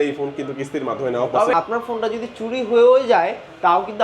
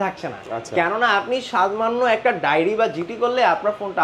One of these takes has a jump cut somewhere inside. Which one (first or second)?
first